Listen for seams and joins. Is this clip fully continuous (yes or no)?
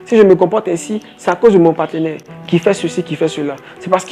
no